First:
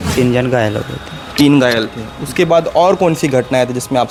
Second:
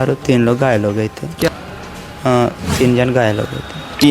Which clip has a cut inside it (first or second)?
second